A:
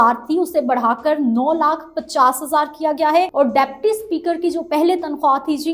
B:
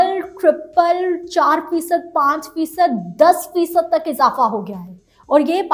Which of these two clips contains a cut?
A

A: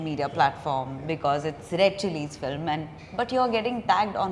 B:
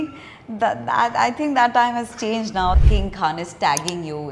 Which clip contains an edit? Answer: B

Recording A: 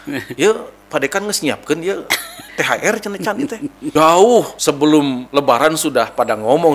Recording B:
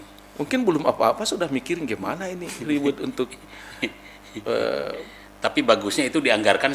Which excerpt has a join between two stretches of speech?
A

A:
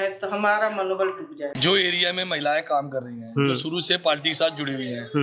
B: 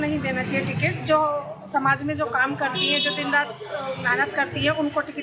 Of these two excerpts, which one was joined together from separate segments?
A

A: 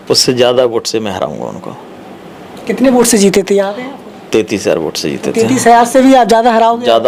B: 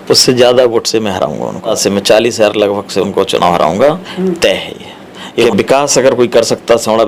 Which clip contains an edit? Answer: B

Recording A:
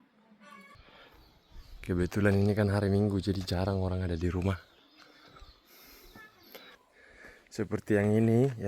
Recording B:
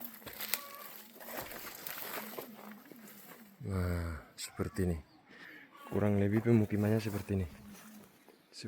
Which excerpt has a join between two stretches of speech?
A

